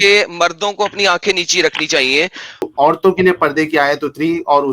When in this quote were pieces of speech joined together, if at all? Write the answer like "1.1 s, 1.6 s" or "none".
2.7 s